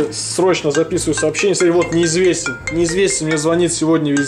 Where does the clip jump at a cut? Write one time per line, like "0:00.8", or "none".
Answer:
none